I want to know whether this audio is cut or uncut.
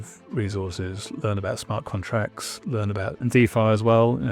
cut